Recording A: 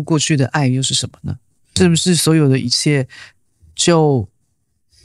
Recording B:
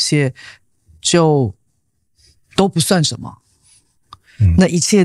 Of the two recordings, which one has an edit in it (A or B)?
A